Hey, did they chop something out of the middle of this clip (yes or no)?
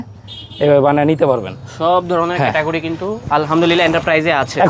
no